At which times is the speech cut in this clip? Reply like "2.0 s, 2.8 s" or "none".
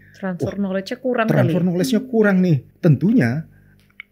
2.7 s